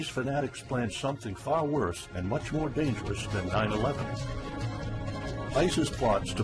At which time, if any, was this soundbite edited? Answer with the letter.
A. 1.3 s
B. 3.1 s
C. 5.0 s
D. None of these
D